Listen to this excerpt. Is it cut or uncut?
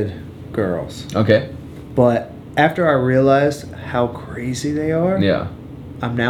uncut